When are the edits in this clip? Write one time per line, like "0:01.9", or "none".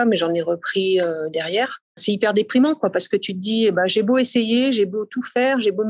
0:02.0